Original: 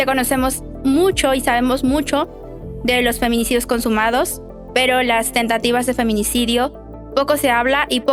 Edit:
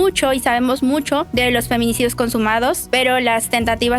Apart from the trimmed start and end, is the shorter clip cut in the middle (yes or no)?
yes